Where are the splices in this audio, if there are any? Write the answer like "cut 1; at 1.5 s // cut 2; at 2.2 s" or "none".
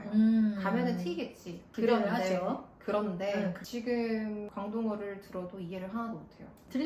cut 1; at 1.7 s